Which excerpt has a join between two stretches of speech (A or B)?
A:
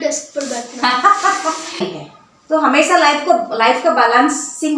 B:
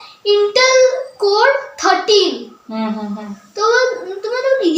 A